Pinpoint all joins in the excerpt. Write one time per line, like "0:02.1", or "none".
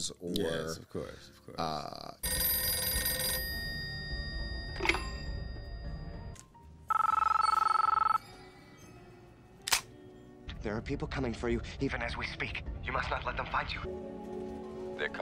0:02.3
0:10.5